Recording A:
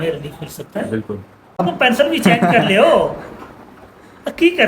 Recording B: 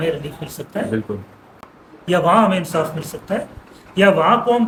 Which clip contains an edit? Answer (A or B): A